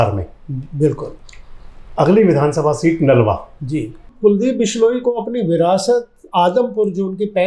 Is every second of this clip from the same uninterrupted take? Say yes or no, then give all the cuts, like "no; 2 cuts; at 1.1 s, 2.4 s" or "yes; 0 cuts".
no; 1 cut; at 4.1 s